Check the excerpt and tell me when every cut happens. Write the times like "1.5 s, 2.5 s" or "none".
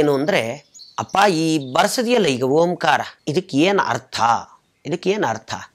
3.2 s